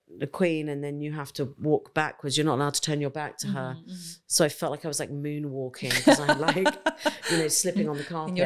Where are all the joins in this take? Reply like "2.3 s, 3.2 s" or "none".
none